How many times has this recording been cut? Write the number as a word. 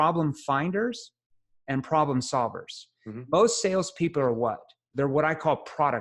zero